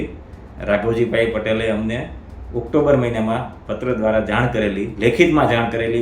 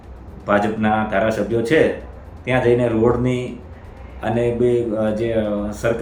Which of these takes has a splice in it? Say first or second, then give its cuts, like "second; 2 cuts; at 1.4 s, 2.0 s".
first; 1 cut; at 4.9 s